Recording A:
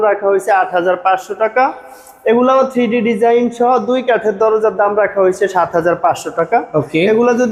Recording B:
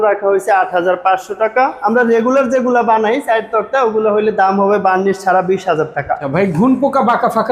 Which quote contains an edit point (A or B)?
B